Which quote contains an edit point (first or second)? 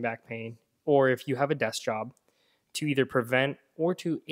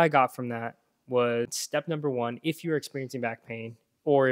second